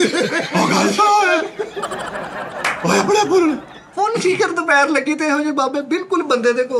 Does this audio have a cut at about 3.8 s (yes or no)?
yes